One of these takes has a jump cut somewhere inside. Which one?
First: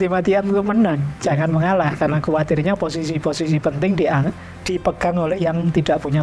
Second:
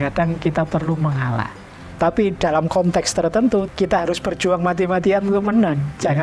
second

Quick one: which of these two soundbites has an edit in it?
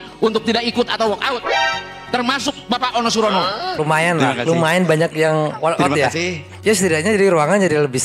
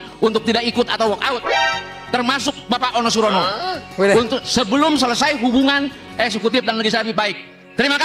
first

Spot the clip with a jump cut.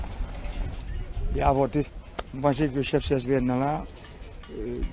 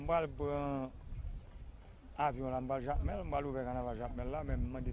second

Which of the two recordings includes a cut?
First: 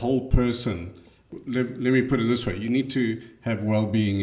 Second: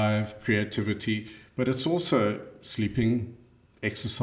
first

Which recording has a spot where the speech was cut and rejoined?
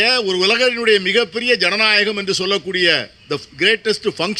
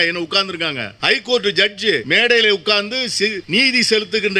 second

